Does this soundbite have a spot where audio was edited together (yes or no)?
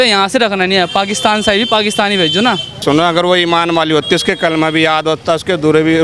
yes